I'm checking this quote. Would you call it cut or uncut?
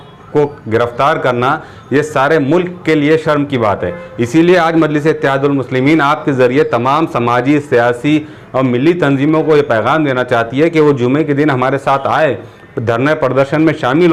uncut